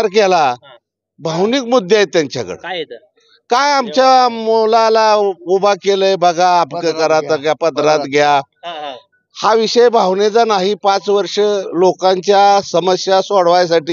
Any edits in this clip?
no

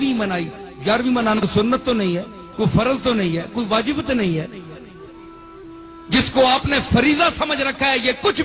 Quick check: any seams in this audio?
yes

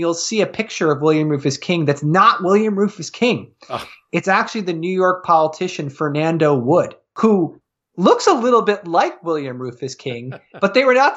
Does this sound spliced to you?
yes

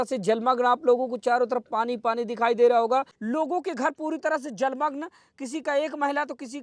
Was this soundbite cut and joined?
yes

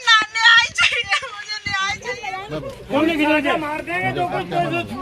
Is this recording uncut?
no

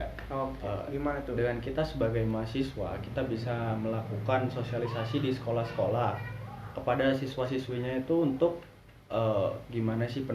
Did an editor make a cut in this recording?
no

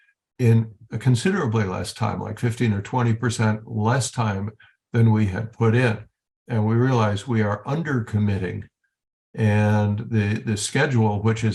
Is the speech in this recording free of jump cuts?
yes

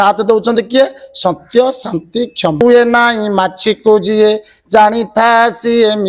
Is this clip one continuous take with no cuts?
no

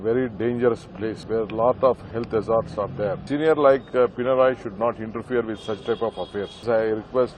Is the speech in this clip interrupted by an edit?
yes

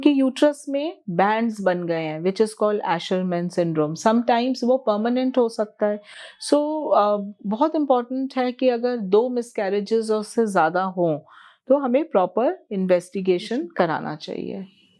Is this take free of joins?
yes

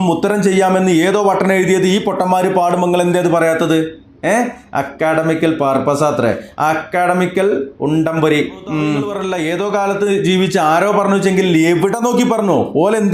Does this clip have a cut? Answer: yes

